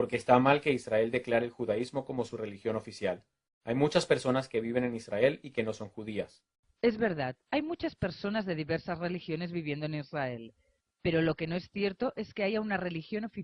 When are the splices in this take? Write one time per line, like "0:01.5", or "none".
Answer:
none